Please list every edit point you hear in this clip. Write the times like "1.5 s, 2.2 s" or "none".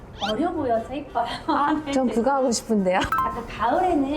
3.1 s